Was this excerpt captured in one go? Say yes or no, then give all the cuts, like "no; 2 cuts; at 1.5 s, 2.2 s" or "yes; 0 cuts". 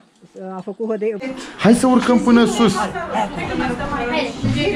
no; 1 cut; at 1.3 s